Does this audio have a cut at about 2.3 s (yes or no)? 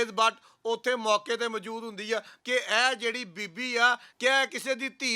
yes